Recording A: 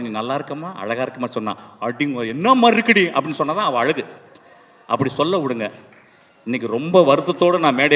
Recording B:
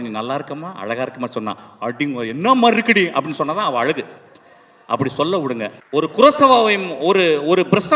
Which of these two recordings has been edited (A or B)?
B